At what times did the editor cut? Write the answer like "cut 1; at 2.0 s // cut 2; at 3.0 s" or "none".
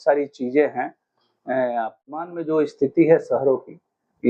cut 1; at 2.2 s